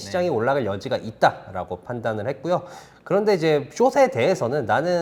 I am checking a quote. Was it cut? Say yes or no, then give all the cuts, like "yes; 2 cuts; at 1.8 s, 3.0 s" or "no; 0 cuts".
no; 0 cuts